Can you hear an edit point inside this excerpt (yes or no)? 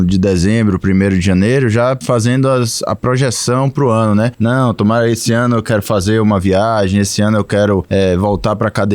yes